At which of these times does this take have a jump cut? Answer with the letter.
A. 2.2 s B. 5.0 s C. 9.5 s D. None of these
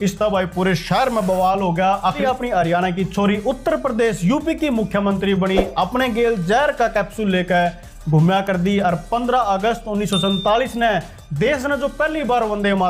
A